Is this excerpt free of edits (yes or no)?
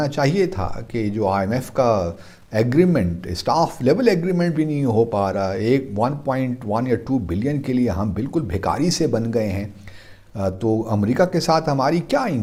yes